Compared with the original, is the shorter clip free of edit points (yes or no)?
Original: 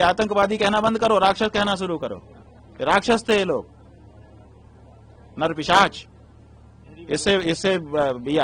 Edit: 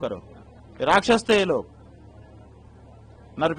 yes